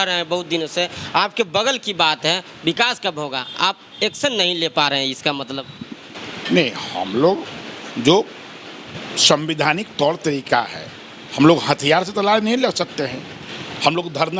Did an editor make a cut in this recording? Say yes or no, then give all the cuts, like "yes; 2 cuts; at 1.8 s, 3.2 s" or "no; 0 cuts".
no; 0 cuts